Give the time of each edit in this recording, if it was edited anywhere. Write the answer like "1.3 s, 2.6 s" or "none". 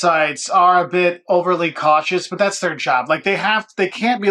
none